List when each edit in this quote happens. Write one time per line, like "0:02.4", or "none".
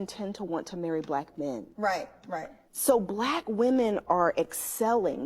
0:03.9